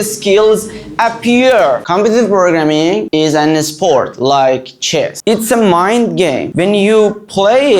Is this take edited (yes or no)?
yes